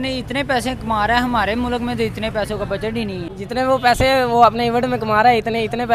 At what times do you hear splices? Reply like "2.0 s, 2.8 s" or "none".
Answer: 3.3 s